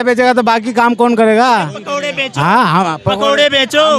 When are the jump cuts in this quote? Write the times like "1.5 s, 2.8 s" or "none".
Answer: none